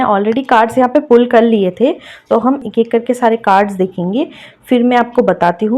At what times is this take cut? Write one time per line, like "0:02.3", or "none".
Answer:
0:02.6